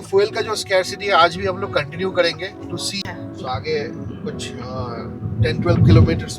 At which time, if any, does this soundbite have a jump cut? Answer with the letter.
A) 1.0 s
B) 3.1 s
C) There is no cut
B